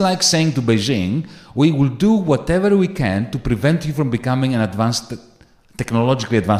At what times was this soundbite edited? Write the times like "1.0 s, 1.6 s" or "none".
none